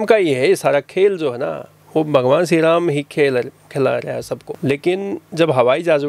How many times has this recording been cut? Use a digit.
1